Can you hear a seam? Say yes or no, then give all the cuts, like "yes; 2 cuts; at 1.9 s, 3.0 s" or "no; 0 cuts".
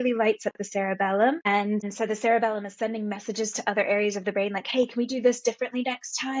yes; 1 cut; at 1.9 s